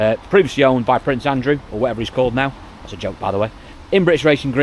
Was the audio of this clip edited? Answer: no; 0 cuts

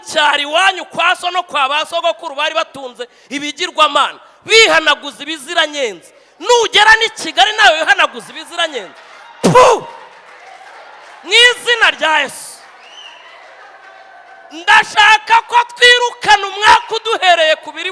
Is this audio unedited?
yes; 0 cuts

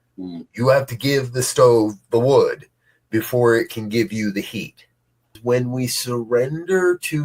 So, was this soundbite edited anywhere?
yes; 1 cut; at 5.4 s

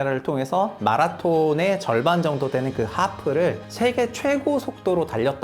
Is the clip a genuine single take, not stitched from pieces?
no; 1 cut; at 3.7 s

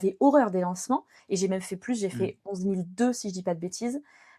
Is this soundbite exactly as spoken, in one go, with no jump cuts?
no; 1 cut; at 1.1 s

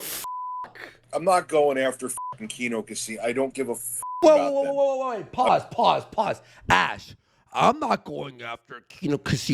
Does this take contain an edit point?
yes; 1 cut; at 1.0 s

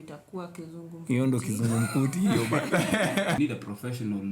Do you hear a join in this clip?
yes; 1 cut; at 3.4 s

